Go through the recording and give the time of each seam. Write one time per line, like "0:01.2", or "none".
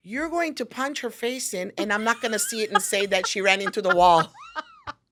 none